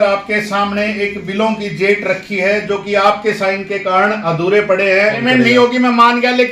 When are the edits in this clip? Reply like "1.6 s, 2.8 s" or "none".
5.2 s